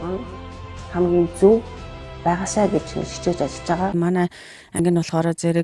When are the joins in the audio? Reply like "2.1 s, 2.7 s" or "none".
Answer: 3.9 s

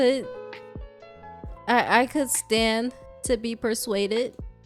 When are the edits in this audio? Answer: none

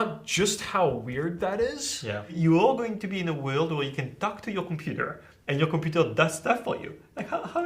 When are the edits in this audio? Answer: 2.3 s

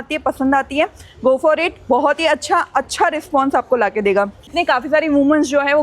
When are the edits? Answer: 4.5 s

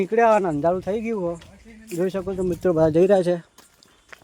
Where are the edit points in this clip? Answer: none

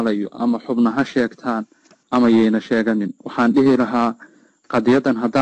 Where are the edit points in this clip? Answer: none

